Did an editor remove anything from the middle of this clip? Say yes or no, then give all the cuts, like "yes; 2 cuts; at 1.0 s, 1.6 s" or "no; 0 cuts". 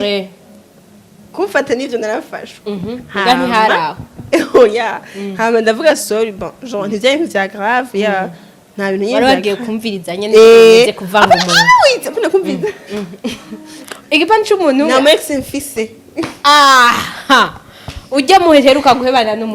yes; 1 cut; at 13.9 s